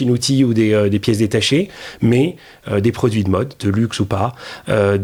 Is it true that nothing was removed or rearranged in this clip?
yes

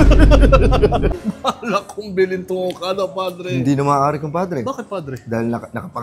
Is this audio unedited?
no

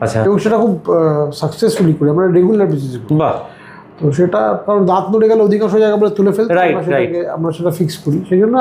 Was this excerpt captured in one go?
yes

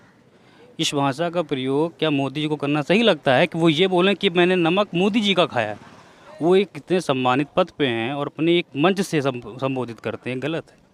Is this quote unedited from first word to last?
yes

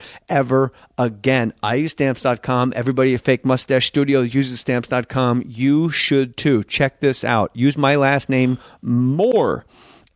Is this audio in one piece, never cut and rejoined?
no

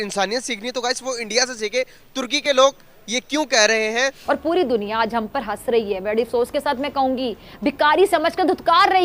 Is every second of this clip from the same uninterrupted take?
no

